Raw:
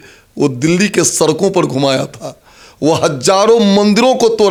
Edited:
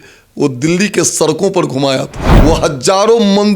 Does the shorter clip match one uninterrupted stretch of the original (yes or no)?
no